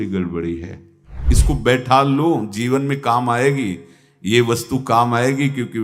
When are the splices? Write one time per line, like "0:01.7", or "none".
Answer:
0:01.2